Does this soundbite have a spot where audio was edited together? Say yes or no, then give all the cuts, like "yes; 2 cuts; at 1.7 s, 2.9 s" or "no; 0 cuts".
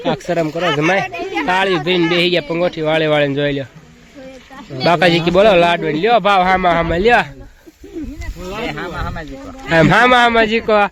no; 0 cuts